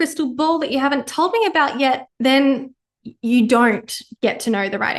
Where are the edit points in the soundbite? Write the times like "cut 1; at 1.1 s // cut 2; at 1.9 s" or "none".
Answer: cut 1; at 2.1 s